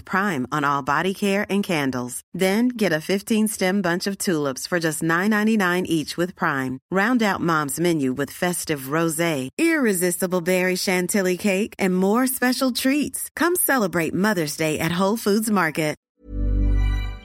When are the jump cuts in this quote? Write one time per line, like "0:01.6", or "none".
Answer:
0:16.1